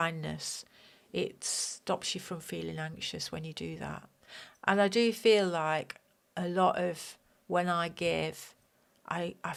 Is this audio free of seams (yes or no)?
yes